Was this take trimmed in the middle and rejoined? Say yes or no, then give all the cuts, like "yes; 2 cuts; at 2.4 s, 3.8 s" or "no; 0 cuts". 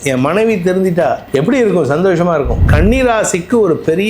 yes; 2 cuts; at 1.2 s, 2.6 s